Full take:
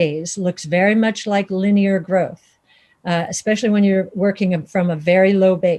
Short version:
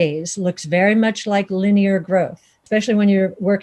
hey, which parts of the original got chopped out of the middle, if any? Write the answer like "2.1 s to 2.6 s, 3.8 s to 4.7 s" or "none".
2.6 s to 3.3 s